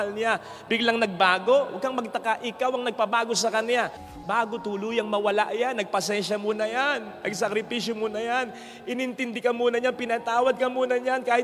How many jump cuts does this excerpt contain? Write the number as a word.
one